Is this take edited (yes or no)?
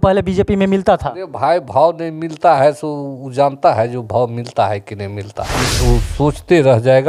yes